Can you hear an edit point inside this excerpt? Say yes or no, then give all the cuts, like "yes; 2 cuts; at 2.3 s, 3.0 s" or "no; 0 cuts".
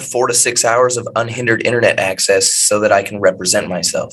no; 0 cuts